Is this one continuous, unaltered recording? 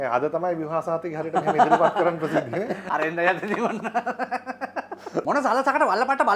no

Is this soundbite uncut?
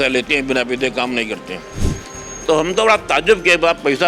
yes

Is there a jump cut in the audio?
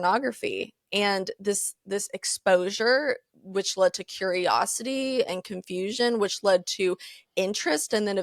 no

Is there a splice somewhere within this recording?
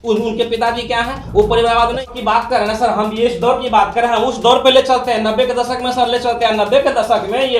yes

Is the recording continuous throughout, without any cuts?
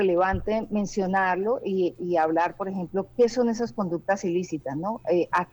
yes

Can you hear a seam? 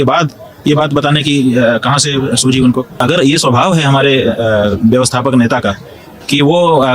yes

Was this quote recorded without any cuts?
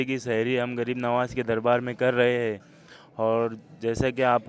yes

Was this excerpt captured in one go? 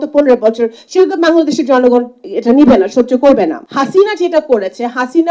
no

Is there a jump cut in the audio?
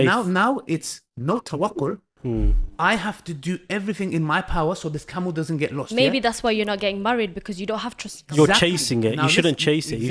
no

